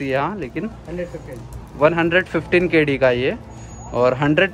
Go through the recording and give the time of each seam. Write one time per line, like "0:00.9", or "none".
none

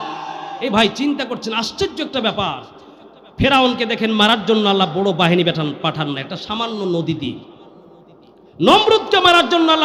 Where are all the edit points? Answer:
none

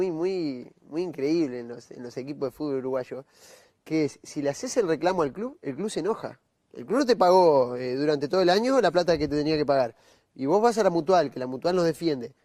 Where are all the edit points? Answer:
0:05.3

